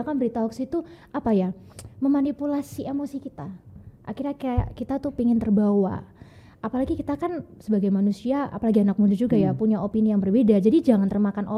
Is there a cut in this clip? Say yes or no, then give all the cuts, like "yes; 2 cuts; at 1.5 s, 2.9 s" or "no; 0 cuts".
no; 0 cuts